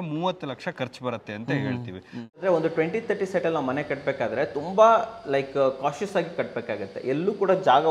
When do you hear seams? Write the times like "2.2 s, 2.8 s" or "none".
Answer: 2.4 s